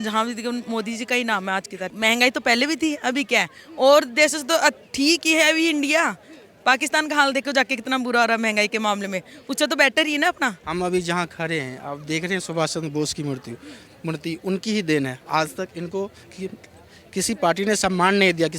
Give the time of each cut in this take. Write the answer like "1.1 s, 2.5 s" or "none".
1.8 s, 10.6 s